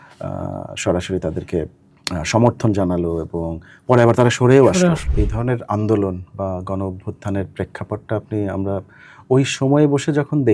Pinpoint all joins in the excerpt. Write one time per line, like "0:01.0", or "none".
0:05.0